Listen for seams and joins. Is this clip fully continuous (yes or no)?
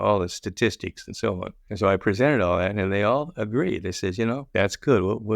no